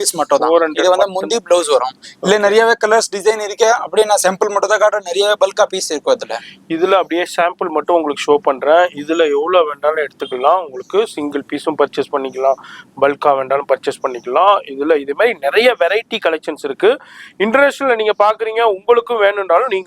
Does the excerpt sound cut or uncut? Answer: uncut